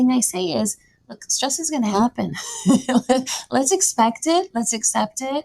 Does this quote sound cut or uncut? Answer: uncut